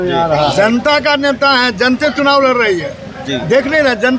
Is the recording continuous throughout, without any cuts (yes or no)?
yes